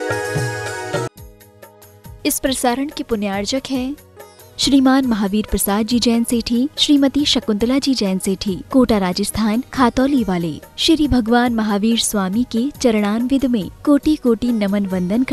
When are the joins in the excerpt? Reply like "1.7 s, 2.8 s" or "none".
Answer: 1.1 s